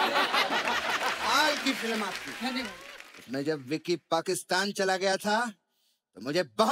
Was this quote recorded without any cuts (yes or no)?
yes